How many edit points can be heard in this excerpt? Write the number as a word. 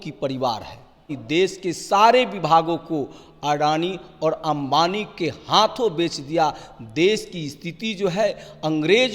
one